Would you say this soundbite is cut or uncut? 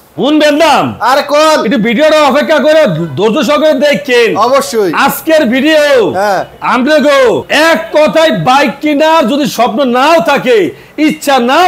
uncut